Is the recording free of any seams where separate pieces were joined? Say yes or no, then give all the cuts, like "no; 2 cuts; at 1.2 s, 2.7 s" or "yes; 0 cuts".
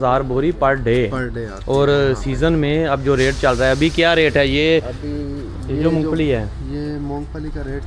yes; 0 cuts